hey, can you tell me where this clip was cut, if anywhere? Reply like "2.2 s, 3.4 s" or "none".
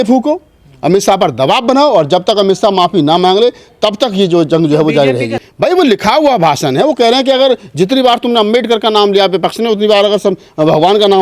5.4 s